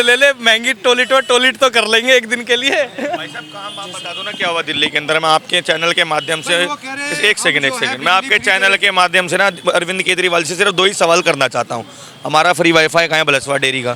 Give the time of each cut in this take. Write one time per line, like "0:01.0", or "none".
none